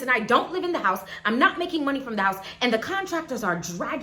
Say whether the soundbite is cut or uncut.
uncut